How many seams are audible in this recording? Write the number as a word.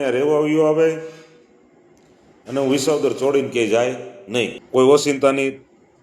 one